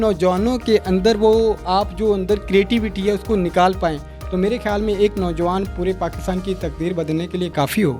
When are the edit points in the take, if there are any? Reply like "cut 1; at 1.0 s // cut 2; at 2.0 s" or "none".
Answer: none